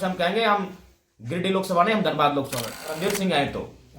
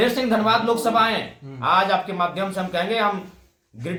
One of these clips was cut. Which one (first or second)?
first